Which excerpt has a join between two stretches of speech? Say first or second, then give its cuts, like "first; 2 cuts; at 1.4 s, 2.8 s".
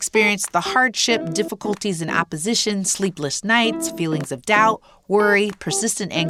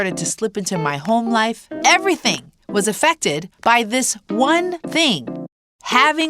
second; 3 cuts; at 1.7 s, 3.5 s, 5.2 s